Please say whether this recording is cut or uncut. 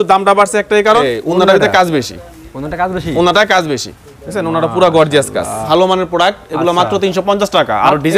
cut